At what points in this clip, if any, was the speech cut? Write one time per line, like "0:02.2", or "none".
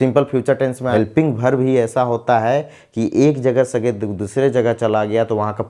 0:00.9